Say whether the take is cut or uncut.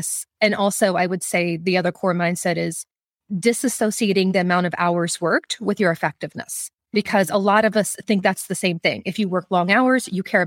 uncut